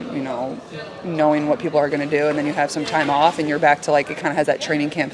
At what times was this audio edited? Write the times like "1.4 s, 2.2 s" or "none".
3.8 s